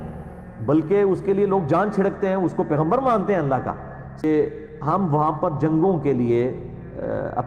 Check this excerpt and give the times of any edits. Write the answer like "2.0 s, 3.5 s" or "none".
4.2 s